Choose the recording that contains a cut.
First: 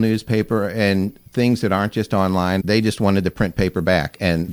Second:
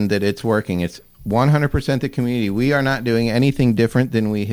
first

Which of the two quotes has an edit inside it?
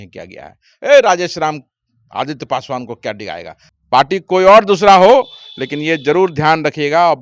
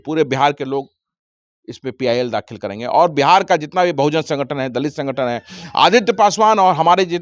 first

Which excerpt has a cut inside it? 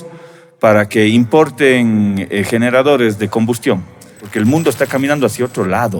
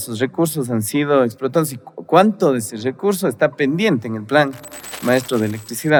first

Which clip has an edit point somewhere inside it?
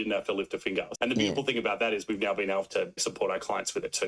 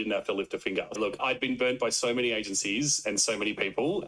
second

